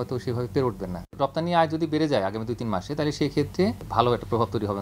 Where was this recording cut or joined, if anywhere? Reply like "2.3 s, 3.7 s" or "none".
1.1 s, 3.8 s